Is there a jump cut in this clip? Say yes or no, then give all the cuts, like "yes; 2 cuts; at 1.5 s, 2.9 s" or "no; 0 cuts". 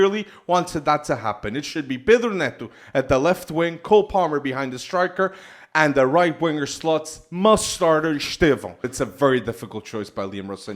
yes; 1 cut; at 8.9 s